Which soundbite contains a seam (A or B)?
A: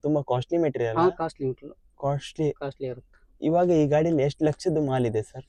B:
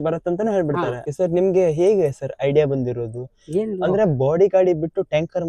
B